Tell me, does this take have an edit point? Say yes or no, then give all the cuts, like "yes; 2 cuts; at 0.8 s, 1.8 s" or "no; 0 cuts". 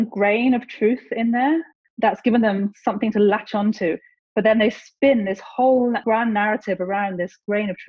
yes; 1 cut; at 1.7 s